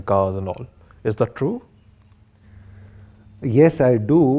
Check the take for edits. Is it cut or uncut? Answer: uncut